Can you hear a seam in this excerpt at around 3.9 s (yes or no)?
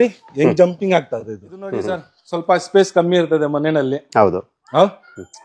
no